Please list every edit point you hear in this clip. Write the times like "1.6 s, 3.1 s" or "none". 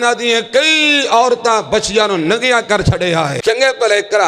3.4 s